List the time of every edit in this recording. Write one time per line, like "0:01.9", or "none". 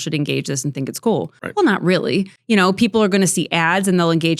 0:01.4
0:02.4